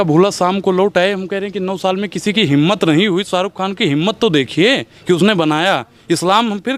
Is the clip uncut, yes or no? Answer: yes